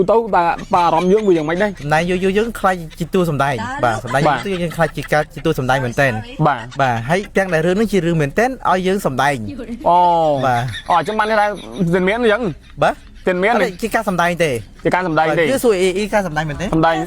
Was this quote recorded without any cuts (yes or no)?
no